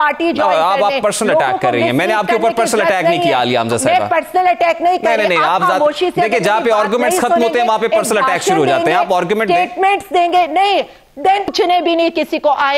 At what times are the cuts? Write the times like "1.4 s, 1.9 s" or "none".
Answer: 11.5 s